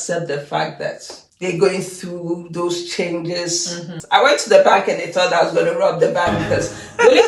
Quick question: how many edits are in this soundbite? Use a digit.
1